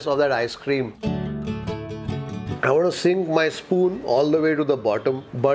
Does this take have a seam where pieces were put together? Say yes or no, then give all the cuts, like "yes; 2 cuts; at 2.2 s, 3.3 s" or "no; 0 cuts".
yes; 2 cuts; at 0.9 s, 2.5 s